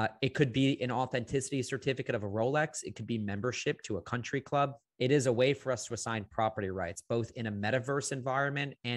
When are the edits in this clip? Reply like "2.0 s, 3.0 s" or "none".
4.8 s